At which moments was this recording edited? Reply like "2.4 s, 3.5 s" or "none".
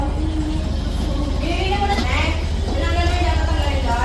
2.0 s